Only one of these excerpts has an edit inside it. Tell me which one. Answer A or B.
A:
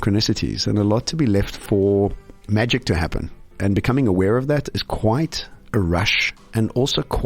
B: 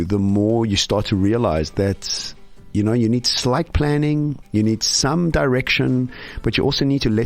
A